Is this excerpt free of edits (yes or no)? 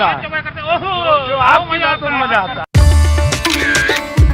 no